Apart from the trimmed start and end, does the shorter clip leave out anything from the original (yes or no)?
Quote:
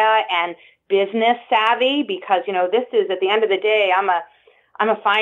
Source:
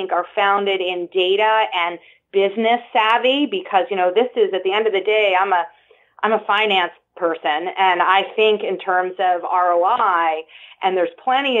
no